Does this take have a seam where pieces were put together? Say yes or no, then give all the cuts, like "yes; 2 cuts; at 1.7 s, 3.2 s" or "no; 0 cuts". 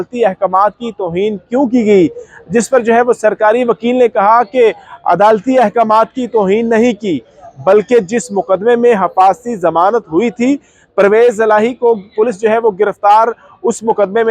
no; 0 cuts